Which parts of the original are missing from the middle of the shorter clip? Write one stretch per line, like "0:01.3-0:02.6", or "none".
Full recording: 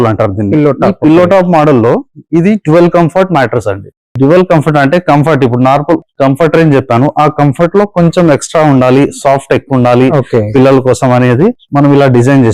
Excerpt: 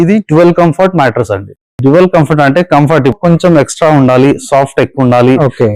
0:05.5-0:07.9